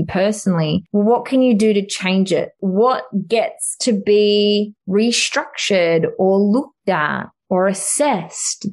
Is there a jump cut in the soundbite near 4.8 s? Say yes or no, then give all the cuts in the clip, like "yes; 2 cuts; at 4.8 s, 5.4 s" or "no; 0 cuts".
yes; 3 cuts; at 0.8 s, 2.6 s, 4.8 s